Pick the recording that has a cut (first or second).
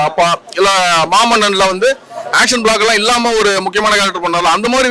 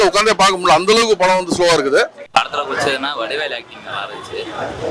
second